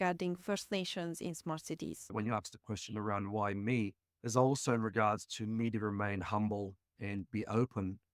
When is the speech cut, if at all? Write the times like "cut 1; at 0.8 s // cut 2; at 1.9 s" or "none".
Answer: cut 1; at 2.1 s